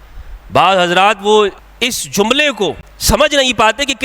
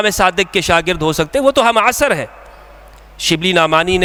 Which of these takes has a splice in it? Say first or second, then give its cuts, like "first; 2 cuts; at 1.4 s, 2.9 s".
first; 2 cuts; at 1.7 s, 2.9 s